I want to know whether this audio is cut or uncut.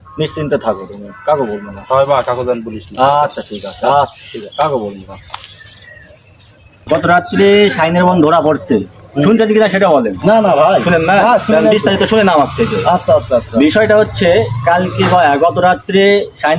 cut